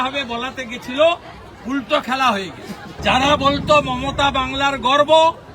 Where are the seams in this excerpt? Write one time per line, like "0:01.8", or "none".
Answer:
0:02.9